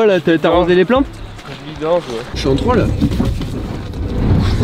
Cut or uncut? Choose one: cut